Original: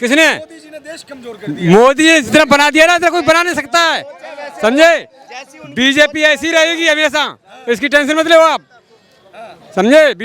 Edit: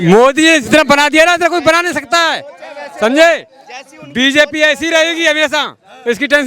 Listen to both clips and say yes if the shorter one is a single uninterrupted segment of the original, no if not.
yes